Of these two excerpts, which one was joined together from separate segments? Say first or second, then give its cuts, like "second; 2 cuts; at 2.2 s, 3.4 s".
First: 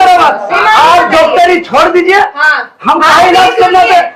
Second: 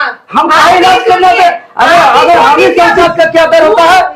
second; 1 cut; at 3.0 s